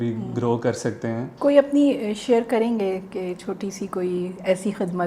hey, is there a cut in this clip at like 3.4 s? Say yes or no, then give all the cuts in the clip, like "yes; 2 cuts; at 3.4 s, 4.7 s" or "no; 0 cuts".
no; 1 cut; at 1.3 s